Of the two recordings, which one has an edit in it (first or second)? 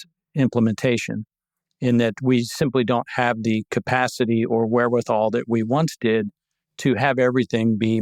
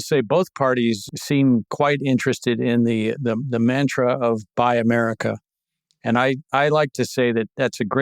second